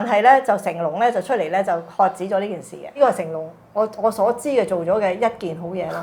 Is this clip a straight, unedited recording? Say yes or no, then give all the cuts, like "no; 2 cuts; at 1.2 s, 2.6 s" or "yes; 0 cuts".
no; 1 cut; at 3.0 s